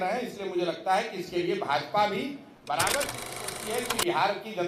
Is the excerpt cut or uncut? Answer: cut